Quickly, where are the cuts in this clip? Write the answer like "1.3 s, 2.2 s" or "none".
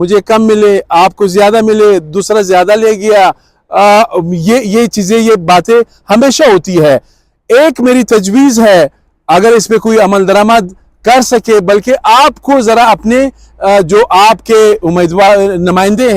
none